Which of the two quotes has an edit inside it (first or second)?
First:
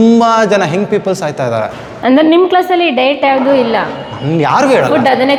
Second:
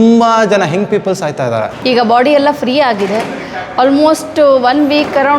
second